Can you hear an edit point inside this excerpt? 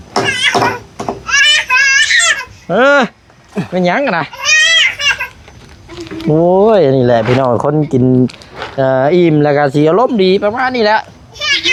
no; 0 cuts

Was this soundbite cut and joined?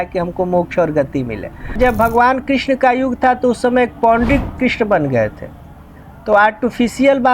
yes; 1 cut; at 1.8 s

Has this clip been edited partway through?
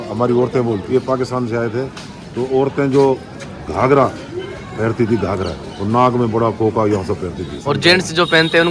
yes; 2 cuts; at 0.9 s, 7.6 s

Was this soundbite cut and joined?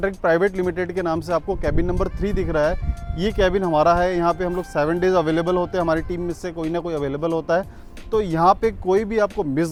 no; 0 cuts

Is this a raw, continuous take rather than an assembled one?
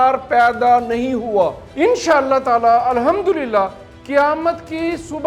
no; 1 cut; at 1.6 s

